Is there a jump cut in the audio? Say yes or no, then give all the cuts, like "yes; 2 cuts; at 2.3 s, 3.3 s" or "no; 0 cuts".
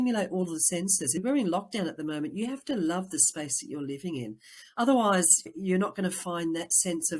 yes; 1 cut; at 1.2 s